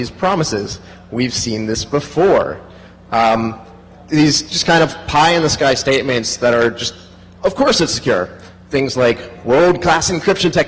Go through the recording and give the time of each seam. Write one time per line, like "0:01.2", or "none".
none